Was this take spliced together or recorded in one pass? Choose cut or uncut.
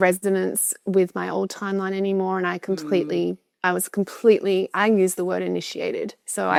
uncut